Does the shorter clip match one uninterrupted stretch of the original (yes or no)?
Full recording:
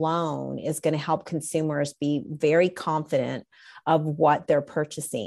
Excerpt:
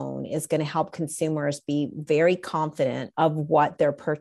no